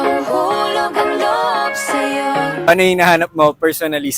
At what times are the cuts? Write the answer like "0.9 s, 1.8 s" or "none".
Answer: 2.7 s